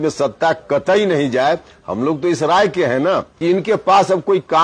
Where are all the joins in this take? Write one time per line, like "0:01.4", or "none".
0:03.4

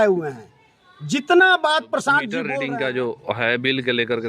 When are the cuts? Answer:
0:02.4

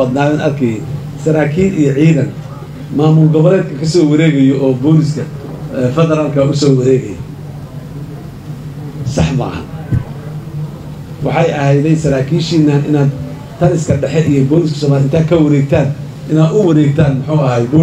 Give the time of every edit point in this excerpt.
none

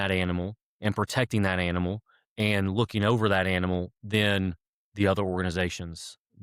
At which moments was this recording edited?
none

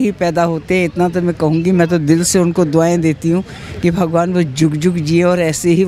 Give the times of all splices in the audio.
none

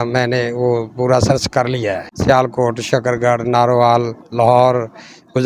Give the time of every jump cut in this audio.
0:02.1

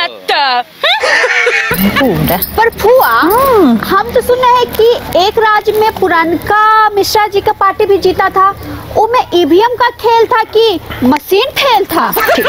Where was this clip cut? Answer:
none

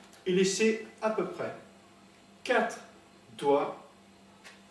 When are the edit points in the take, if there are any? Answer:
0:01.8

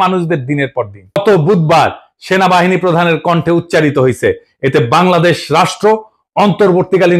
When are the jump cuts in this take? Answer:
0:01.2

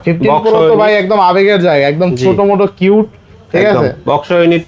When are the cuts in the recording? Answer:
none

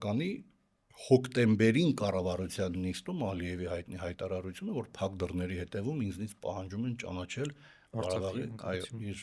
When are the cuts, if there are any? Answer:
none

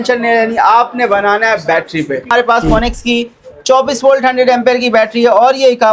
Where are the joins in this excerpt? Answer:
0:02.3

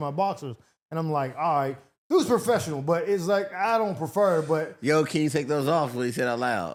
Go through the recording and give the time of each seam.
none

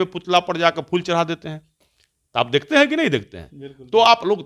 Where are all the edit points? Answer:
none

